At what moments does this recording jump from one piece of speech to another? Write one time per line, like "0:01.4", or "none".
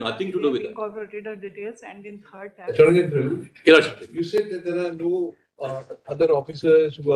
none